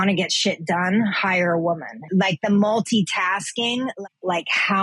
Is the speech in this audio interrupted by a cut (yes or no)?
yes